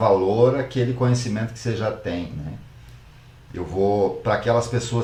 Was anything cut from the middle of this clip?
no; 0 cuts

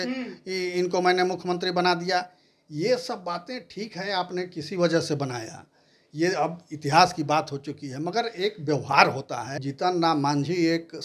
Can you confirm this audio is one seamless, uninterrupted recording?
no; 1 cut; at 9.6 s

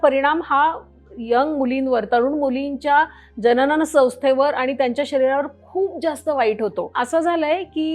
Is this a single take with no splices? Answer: yes; 0 cuts

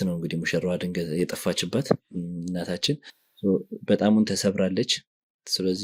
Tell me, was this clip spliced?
no; 0 cuts

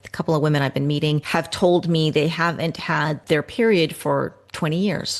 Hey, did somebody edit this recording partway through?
yes; 2 cuts; at 1.3 s, 3.2 s

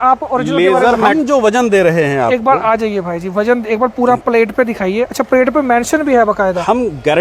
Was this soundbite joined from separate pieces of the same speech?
yes; 1 cut; at 1.1 s

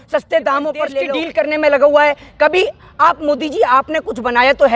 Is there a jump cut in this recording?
yes; 1 cut; at 1.0 s

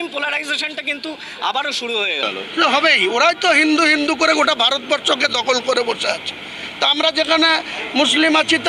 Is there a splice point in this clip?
no; 0 cuts

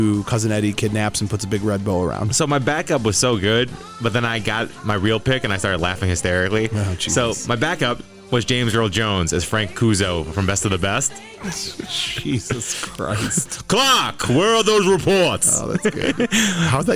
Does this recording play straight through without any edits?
yes; 0 cuts

